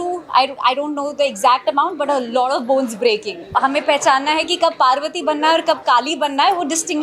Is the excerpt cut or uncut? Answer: cut